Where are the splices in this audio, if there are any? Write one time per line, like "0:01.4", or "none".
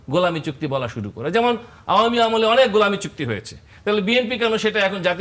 none